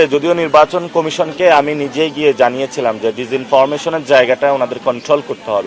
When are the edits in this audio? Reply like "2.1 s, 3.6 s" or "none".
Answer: none